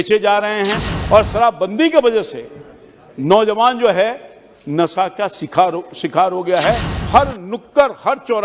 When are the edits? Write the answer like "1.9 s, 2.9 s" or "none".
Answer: 0.9 s, 6.9 s